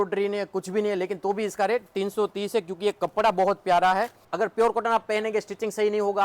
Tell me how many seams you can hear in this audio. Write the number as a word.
one